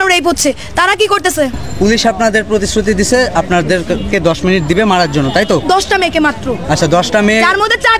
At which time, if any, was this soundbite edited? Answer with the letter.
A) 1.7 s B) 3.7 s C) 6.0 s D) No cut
A